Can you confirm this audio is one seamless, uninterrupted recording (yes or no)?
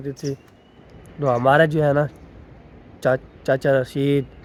yes